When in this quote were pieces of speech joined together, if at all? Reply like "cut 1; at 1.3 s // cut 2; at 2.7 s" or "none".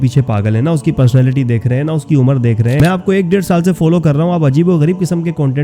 cut 1; at 2.8 s